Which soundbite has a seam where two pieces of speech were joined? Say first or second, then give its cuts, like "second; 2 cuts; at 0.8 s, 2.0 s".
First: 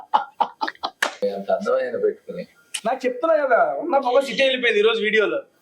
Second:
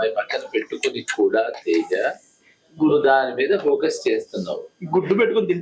first; 1 cut; at 1.2 s